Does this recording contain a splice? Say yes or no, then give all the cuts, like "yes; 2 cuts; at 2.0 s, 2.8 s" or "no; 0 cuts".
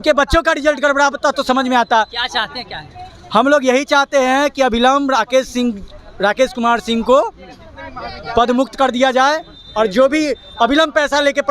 no; 0 cuts